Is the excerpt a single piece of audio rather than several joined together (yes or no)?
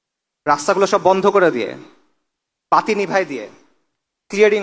yes